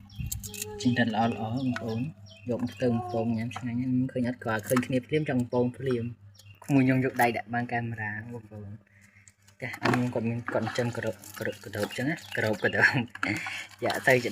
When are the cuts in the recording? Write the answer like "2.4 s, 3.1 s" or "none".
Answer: 6.5 s